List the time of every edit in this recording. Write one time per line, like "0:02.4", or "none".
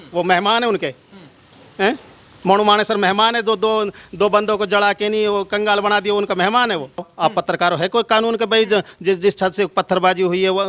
0:07.1

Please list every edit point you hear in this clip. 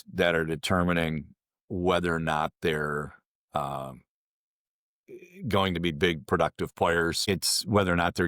0:07.3

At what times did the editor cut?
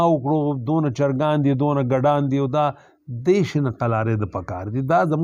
none

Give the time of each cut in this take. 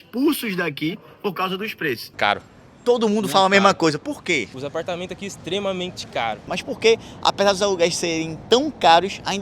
0:02.1
0:04.5
0:06.5

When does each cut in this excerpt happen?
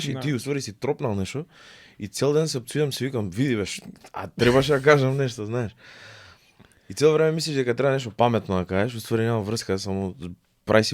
none

